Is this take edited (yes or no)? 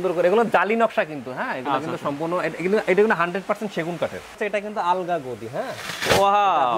yes